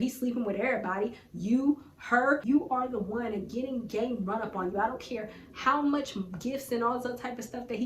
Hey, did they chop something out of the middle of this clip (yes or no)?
yes